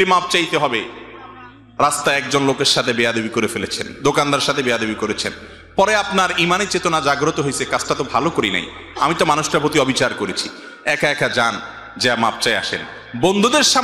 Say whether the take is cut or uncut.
uncut